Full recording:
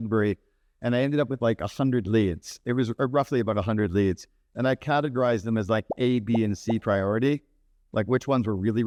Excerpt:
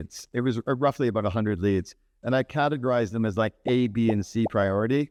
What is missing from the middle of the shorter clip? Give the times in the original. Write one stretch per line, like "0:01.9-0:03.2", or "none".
none